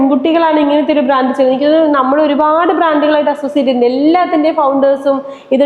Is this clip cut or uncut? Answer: uncut